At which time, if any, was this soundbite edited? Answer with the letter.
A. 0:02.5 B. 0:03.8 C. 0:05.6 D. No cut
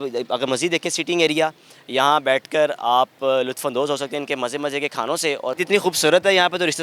C